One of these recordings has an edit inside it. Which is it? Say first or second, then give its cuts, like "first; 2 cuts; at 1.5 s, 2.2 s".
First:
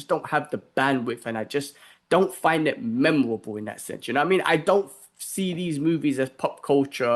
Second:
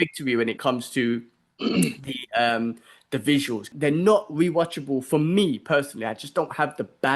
second; 1 cut; at 3.7 s